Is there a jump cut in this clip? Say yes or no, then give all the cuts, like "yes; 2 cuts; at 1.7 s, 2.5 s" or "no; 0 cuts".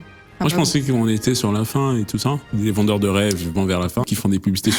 yes; 2 cuts; at 2.5 s, 4.0 s